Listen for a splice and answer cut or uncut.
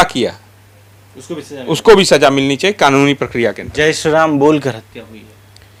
uncut